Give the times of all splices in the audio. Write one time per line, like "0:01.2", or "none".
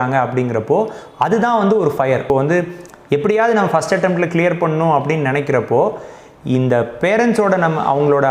0:02.2